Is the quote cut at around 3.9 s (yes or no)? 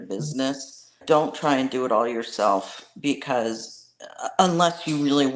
no